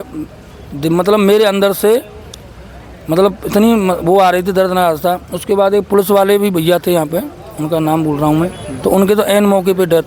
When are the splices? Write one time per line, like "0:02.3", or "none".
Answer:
none